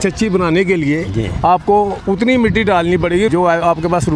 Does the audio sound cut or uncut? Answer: cut